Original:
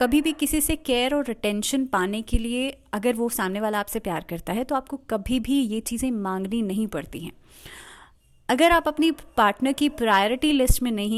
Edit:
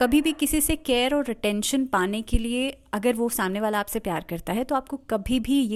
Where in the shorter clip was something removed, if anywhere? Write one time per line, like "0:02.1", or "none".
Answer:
none

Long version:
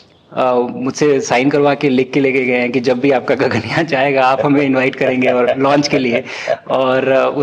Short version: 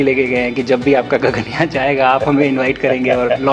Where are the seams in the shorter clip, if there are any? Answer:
none

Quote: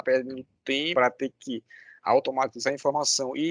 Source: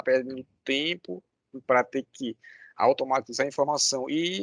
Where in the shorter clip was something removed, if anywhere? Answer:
0:00.9

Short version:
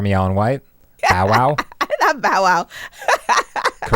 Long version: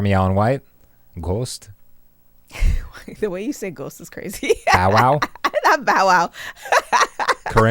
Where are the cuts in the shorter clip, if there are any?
0:01.0

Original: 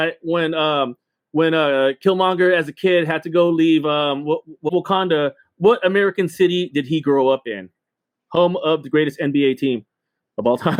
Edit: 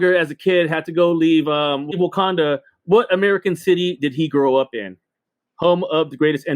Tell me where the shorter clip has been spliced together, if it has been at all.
0:01.8

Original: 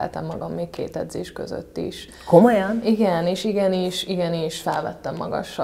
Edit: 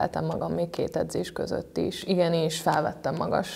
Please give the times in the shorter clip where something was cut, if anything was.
0:02.0

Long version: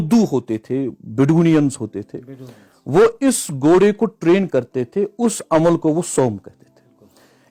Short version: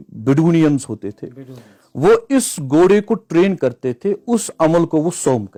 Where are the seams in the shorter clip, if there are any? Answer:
none

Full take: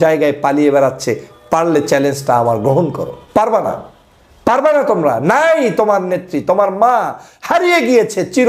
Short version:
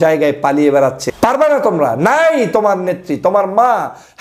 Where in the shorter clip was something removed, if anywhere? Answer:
0:01.0

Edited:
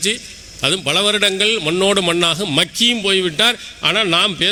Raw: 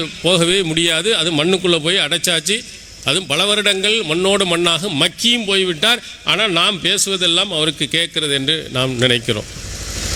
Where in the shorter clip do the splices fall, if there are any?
none

